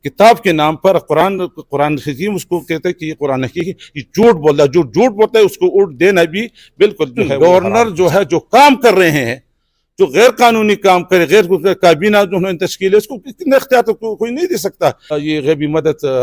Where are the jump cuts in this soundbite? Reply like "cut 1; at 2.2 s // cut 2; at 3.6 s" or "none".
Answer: cut 1; at 7.3 s // cut 2; at 15.2 s